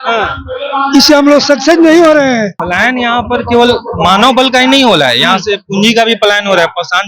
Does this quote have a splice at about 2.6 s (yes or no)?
yes